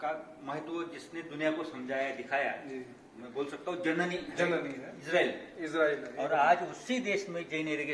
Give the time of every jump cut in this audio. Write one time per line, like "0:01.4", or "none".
none

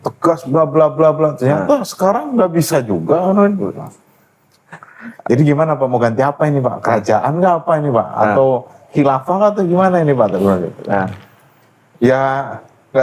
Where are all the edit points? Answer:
none

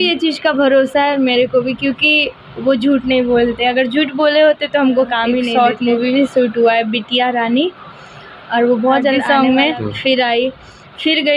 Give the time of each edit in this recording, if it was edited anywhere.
0:05.5
0:09.2

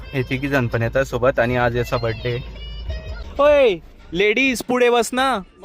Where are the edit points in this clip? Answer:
0:03.2

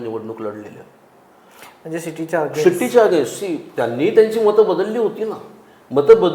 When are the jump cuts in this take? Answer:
none

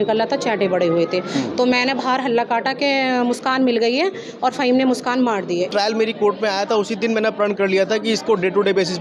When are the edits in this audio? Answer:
0:05.7

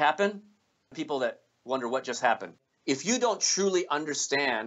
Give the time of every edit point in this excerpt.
0:01.0
0:02.6

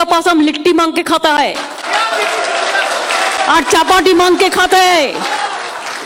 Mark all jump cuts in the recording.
none

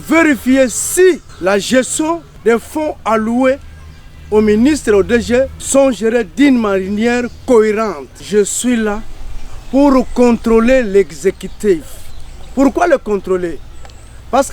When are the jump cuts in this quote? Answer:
0:01.3
0:02.3
0:05.6
0:08.2

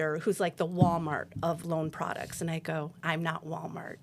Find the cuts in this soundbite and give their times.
0:01.6
0:02.9

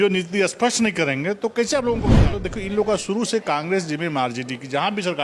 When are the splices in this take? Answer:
0:02.1

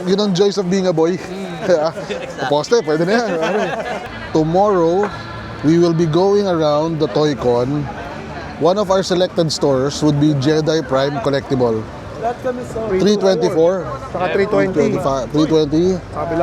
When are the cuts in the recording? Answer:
0:04.1

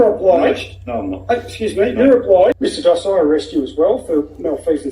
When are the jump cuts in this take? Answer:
0:02.6

